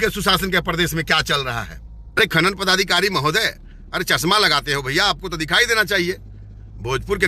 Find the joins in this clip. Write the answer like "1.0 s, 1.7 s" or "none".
2.2 s